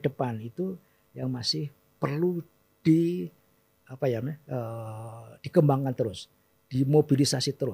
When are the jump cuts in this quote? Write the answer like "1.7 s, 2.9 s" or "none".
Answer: none